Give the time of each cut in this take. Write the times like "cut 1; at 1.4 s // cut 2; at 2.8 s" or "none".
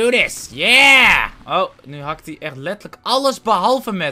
none